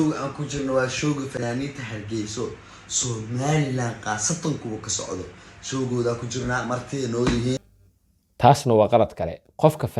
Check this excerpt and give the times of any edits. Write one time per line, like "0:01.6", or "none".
0:07.6